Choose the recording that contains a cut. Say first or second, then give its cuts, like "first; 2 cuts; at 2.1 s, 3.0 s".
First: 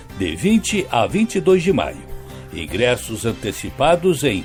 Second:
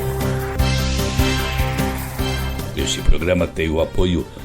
second; 2 cuts; at 1.5 s, 3.0 s